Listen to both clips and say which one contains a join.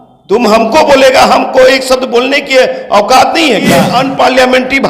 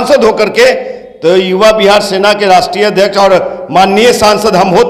first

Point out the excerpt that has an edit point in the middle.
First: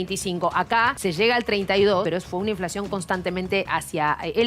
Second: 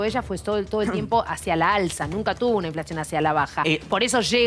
first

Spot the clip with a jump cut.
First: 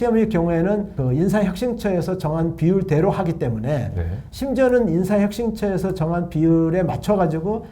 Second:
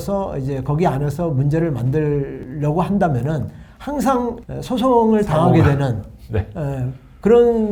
first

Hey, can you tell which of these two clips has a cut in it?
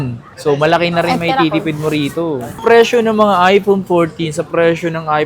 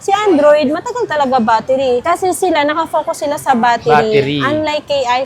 first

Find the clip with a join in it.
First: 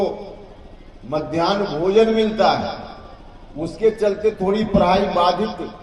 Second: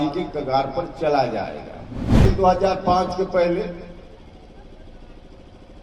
second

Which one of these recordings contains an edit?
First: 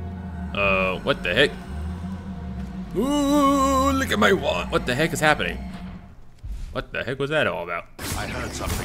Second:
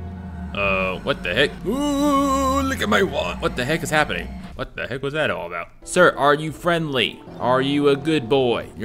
second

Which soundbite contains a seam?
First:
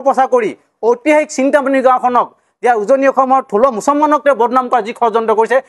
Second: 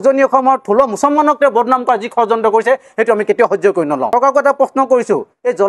second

